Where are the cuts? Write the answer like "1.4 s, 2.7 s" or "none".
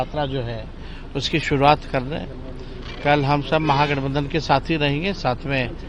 none